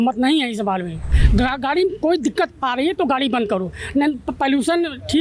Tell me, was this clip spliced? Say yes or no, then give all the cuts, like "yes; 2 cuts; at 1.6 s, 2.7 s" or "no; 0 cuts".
yes; 1 cut; at 1.2 s